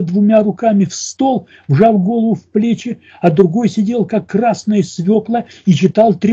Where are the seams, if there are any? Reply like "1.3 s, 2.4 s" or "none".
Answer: none

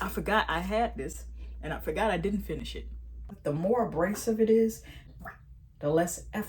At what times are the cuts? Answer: 3.3 s, 5.0 s

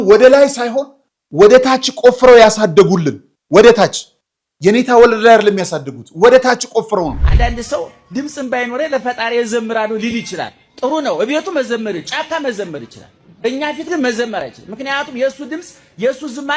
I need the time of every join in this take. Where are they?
7.2 s

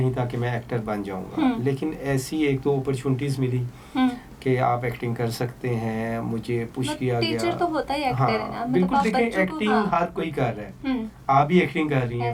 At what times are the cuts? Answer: none

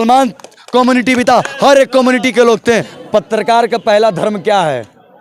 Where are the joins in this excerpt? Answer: 2.9 s

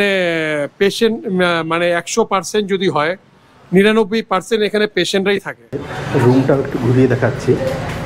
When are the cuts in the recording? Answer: 5.9 s

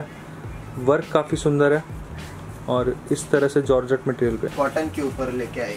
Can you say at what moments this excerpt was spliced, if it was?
4.5 s

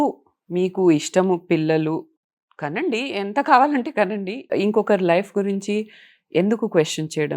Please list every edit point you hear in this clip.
2.2 s, 4.5 s

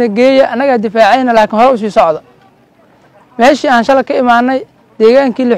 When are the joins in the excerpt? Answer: none

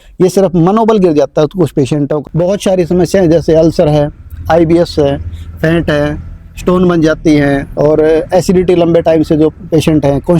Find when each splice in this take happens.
2.2 s

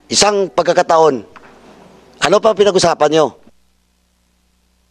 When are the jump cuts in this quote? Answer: none

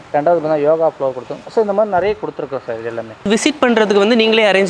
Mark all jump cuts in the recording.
3.2 s

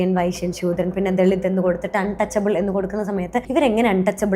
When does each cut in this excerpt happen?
3.5 s

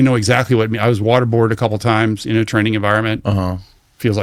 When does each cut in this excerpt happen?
none

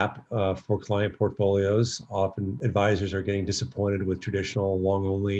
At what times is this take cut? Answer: 2.5 s

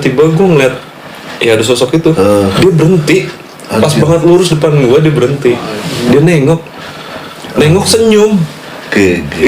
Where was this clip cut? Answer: 2.5 s, 6.1 s

